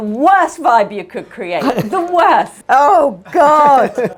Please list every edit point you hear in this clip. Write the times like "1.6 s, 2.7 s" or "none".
none